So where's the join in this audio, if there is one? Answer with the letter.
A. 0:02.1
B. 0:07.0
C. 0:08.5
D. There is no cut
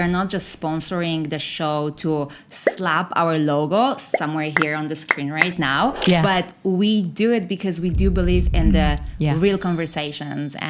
D